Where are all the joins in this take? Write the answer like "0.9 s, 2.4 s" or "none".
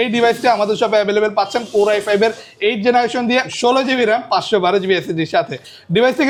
none